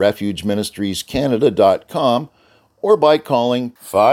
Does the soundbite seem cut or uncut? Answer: uncut